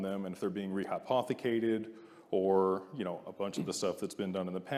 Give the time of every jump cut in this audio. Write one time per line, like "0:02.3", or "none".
none

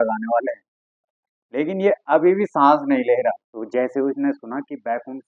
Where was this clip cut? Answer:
0:03.5

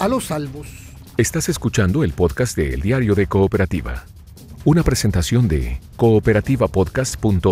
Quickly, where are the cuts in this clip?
0:01.0

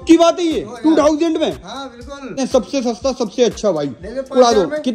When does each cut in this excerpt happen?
0:02.4

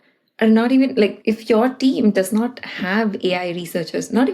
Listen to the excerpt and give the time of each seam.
0:01.2

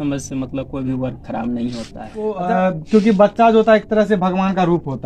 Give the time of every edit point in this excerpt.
0:02.4

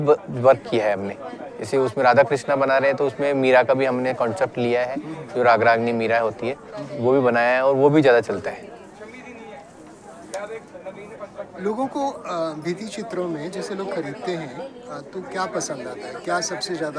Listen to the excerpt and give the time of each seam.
none

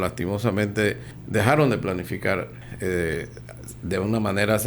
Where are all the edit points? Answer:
0:01.1
0:02.6

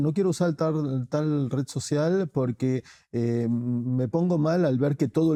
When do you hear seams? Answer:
none

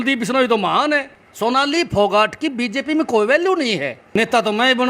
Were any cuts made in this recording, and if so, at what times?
0:01.2
0:03.9

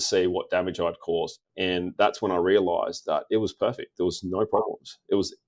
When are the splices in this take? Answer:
0:01.4

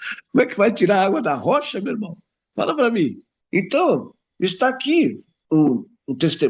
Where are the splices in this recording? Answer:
0:03.3
0:05.3

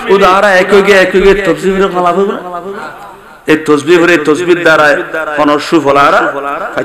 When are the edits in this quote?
none

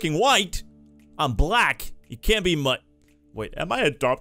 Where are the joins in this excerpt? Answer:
none

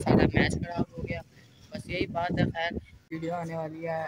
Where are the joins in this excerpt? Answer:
0:03.0

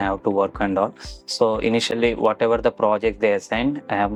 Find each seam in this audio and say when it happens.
none

